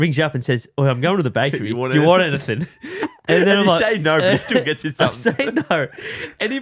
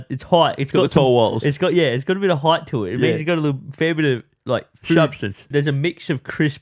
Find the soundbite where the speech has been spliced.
second; 1 cut; at 5.5 s

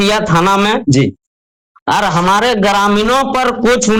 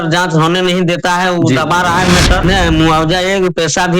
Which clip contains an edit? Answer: second; 1 cut; at 2.4 s

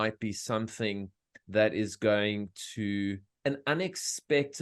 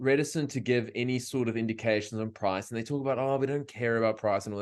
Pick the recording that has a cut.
first; 1 cut; at 3.2 s

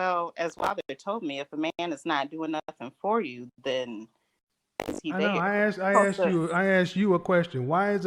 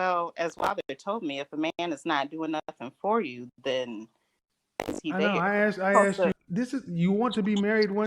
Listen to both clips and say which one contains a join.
second; 1 cut; at 6.3 s

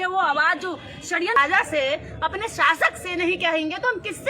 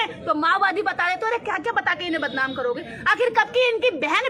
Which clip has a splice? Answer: first; 1 cut; at 1.4 s

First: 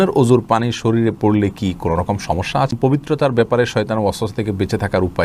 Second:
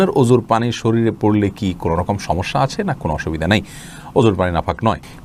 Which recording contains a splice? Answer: first; 1 cut; at 2.7 s

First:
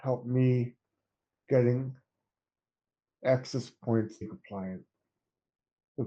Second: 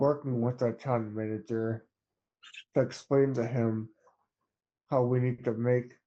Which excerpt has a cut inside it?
first; 1 cut; at 4.3 s

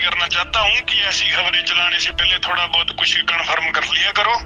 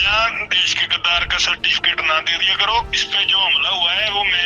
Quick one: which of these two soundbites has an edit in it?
second; 1 cut; at 2.9 s

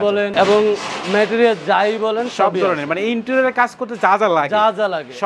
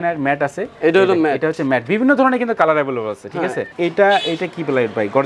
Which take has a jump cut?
second; 1 cut; at 3.7 s

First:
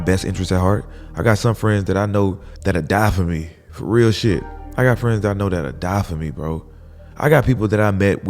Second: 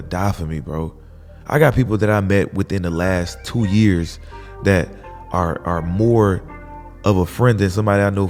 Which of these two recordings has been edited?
first; 2 cuts; at 2.5 s, 4.6 s

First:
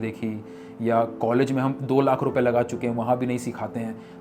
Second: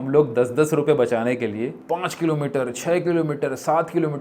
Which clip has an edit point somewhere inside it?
second; 1 cut; at 1.8 s

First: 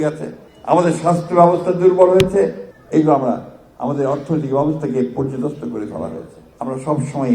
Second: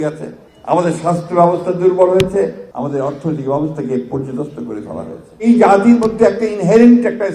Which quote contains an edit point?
second; 2 cuts; at 2.7 s, 5.4 s

